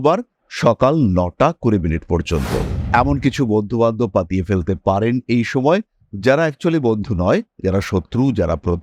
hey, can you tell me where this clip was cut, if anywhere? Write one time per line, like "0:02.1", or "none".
0:02.8